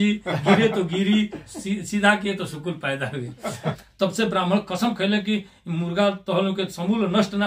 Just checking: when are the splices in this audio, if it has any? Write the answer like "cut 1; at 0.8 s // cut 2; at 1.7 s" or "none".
cut 1; at 3.8 s